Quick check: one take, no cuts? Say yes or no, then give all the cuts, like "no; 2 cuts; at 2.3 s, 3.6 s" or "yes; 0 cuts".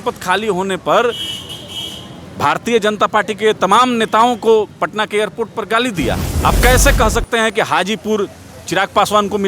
no; 1 cut; at 6.3 s